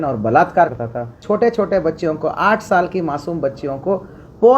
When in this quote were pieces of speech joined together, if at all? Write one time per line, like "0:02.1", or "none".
0:01.2

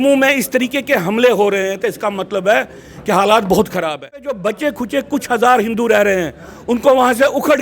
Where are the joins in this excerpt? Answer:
0:04.3

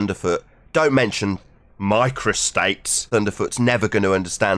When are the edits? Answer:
0:03.0

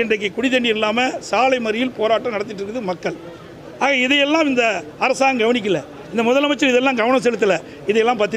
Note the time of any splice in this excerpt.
none

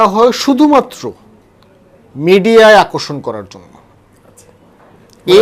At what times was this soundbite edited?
none

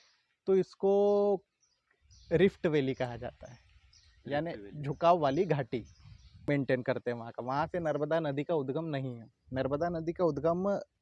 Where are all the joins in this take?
0:06.3

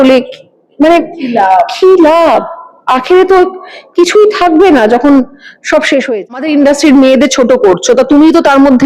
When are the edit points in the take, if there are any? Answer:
0:06.2

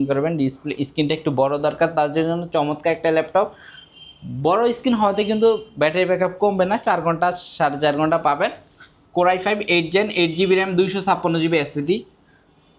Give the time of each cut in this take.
none

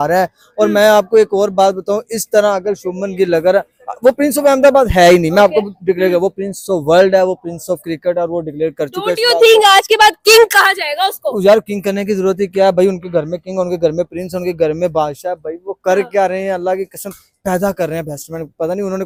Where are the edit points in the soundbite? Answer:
none

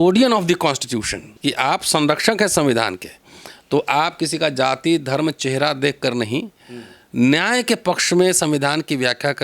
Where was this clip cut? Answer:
0:01.2

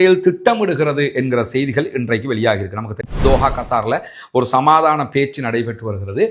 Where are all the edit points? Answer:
0:03.0

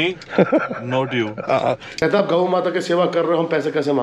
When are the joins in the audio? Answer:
0:01.9

